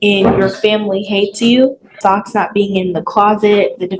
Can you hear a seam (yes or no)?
yes